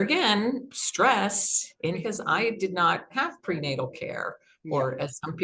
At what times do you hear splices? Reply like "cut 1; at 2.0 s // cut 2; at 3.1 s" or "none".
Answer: cut 1; at 2.0 s